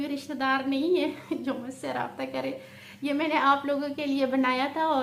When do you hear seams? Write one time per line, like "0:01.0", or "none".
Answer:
none